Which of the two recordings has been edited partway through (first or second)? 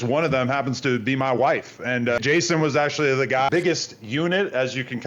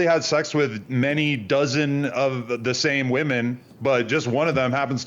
first